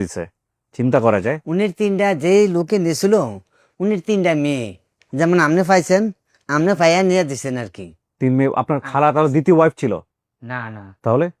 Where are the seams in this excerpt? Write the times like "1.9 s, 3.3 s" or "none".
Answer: none